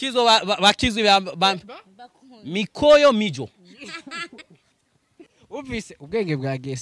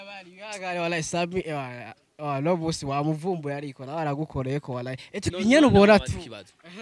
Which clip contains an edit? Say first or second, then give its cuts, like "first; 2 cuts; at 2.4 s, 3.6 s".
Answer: second; 1 cut; at 5.1 s